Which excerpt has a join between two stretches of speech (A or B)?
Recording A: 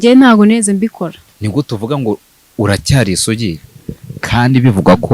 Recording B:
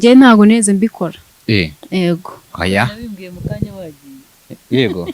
A